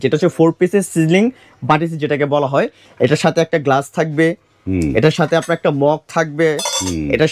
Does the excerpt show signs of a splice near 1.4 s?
no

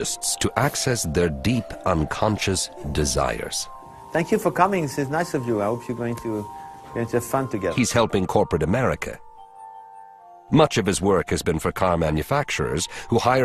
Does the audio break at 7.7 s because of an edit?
no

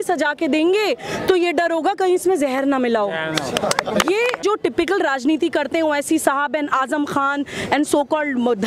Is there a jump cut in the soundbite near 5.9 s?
no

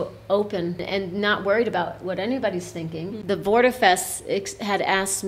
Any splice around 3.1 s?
yes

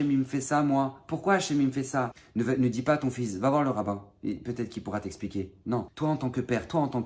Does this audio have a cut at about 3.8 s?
no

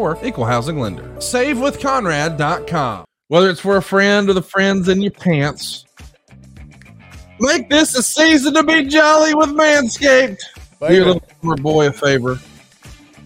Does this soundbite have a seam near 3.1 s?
yes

